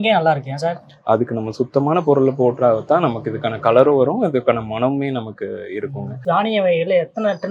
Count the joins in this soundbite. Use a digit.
1